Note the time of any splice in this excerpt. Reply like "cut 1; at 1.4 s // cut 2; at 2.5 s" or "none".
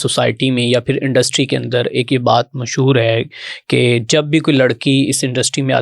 none